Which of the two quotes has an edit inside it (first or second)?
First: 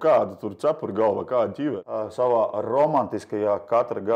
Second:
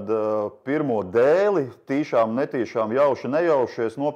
first